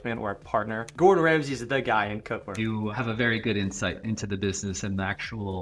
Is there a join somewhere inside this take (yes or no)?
yes